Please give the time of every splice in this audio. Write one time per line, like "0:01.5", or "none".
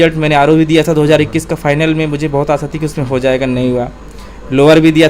none